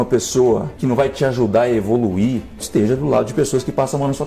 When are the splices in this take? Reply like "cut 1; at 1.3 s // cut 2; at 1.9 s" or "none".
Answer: none